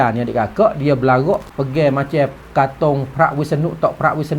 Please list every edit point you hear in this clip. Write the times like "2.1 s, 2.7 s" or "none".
1.5 s

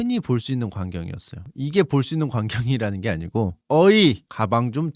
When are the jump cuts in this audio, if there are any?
1.5 s

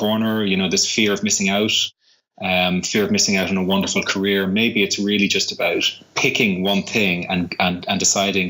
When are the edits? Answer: none

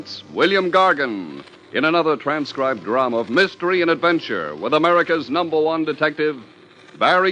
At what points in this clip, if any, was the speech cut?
5.2 s

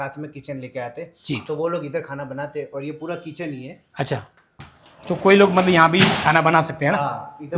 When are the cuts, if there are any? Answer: none

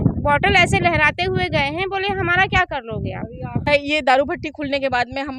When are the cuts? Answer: 3.7 s

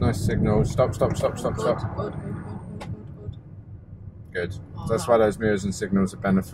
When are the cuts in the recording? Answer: none

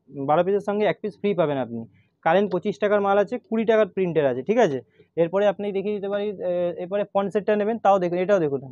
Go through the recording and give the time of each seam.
none

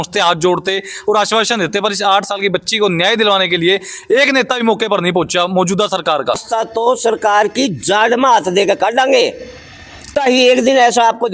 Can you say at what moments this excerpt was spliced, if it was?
6.4 s, 10.1 s

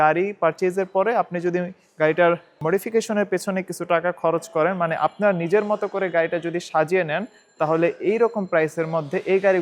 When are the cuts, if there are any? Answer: 2.5 s

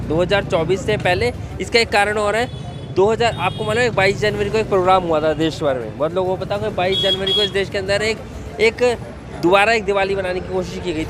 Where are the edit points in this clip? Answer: none

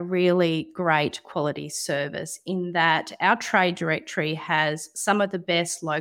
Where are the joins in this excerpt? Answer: none

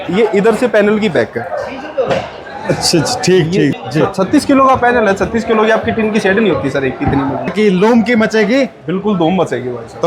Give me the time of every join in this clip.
3.7 s, 7.5 s

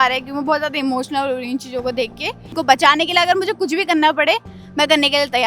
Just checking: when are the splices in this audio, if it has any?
2.6 s

